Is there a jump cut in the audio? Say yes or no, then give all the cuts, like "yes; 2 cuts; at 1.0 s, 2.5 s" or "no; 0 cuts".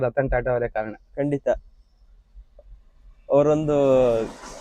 no; 0 cuts